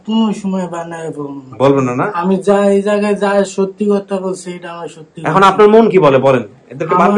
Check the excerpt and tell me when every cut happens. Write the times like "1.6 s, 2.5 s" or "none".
none